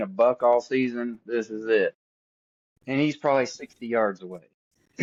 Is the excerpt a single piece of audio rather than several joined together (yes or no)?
yes